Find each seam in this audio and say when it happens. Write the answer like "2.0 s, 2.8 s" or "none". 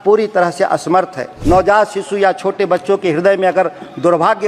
1.3 s